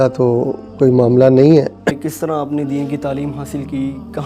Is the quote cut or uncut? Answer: cut